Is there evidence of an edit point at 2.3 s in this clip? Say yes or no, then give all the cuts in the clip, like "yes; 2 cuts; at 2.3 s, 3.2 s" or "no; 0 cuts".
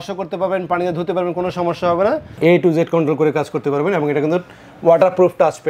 yes; 1 cut; at 2.3 s